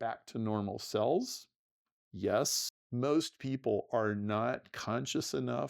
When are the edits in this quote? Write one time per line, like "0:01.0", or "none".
0:02.7

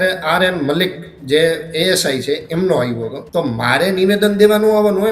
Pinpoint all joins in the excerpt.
0:03.2

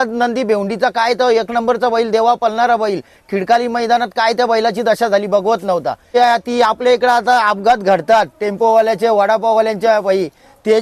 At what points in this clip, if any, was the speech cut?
0:06.1

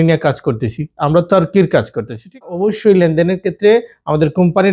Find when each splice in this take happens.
0:02.8

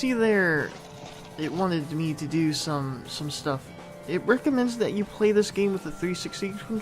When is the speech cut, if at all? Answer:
0:05.6

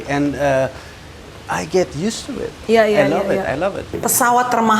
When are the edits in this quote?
0:03.9

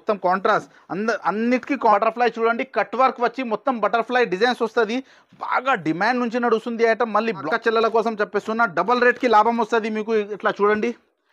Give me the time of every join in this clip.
0:01.9
0:07.4

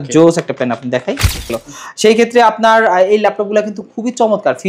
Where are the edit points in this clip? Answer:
0:01.5

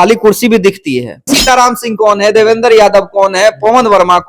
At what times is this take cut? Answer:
0:01.2

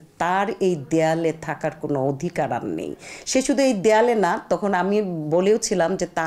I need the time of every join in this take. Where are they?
none

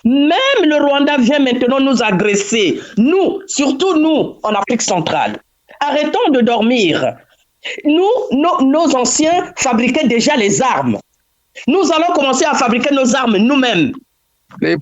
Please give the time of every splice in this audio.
none

